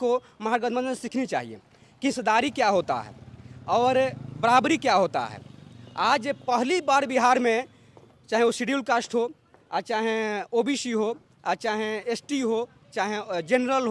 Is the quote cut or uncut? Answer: uncut